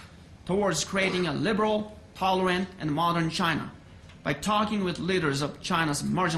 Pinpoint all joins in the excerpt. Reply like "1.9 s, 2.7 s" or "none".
2.5 s